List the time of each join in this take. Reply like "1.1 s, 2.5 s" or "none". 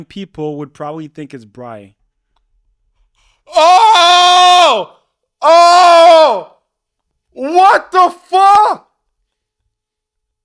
none

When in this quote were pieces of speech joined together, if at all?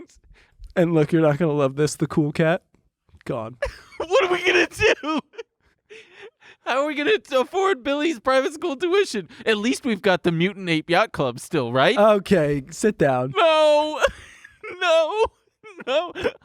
3.5 s

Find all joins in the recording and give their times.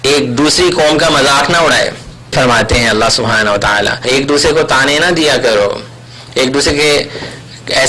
2.3 s, 4.0 s

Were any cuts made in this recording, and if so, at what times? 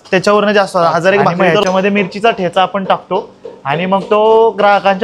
1.5 s

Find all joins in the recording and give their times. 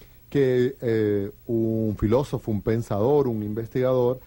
1.1 s

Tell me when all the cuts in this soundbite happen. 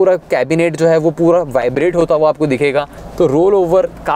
3.0 s

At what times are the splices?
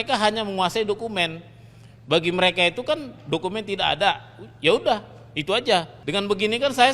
6.0 s

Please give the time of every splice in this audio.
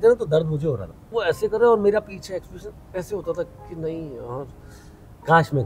1.1 s

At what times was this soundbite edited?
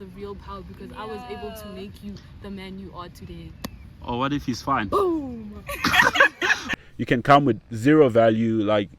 6.7 s

